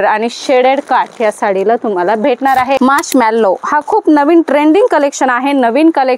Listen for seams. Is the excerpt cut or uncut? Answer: cut